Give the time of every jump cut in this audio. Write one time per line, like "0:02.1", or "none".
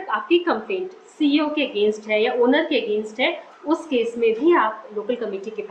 none